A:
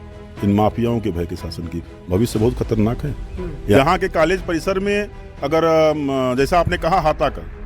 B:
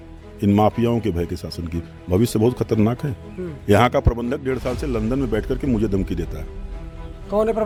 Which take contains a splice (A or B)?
A